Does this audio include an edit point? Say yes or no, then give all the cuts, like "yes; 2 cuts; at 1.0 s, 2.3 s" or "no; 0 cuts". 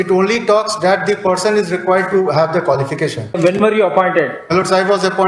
yes; 1 cut; at 3.4 s